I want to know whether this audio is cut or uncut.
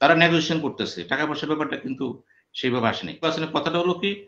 cut